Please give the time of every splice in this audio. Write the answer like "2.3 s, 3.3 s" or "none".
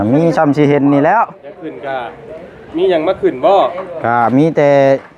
1.7 s